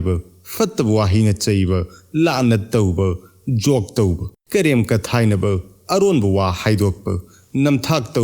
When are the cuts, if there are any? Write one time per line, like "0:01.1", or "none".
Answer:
0:04.3